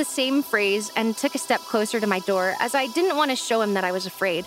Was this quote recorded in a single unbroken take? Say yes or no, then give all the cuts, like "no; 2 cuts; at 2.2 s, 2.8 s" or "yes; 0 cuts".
yes; 0 cuts